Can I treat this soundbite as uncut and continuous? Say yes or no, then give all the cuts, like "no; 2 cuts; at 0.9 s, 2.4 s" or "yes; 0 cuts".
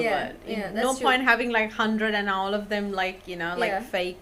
yes; 0 cuts